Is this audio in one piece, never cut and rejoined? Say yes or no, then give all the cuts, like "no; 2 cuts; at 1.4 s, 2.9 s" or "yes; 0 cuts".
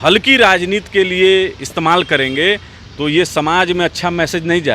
yes; 0 cuts